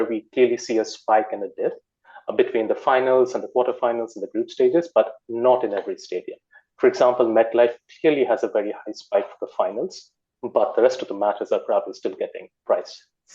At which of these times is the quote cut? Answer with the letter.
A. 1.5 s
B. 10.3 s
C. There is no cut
C